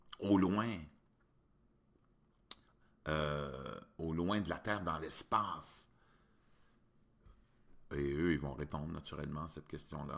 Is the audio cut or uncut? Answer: uncut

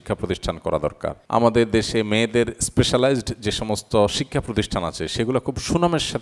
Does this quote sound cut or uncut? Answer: cut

